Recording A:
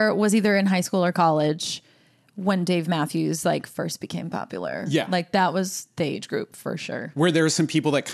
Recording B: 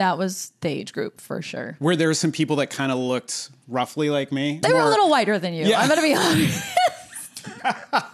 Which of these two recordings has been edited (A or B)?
B